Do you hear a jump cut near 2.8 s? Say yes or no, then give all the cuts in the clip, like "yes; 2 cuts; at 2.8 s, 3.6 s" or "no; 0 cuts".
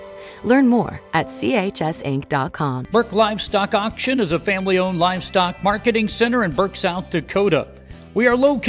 yes; 1 cut; at 2.8 s